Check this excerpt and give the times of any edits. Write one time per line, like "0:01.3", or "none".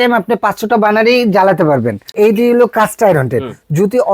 0:02.1